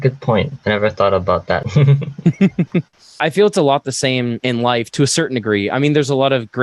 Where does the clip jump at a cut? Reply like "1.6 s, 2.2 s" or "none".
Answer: 1.6 s, 3.2 s